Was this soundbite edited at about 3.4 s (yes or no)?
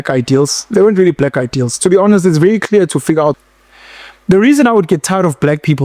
yes